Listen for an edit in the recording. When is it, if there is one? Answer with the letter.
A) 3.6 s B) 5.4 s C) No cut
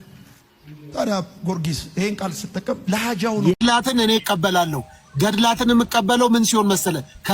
A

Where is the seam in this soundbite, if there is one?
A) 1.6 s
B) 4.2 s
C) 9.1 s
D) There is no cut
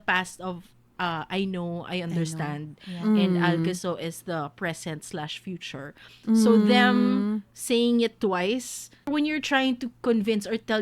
C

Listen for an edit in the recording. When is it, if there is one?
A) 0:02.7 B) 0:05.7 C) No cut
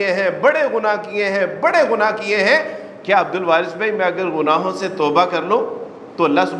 C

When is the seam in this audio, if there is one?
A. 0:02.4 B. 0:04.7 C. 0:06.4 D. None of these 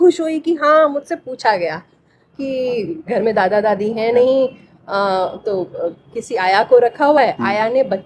A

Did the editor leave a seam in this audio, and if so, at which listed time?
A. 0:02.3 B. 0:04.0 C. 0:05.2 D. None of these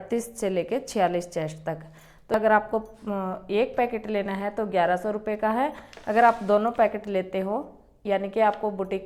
A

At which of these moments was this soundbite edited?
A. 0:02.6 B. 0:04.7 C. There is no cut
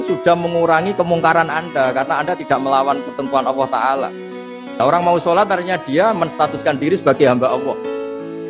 B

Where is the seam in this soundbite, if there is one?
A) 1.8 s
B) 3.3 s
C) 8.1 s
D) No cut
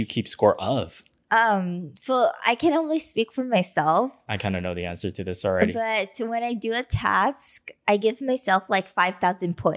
D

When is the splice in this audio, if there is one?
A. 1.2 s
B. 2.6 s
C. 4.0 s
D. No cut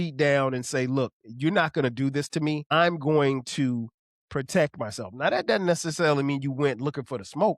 B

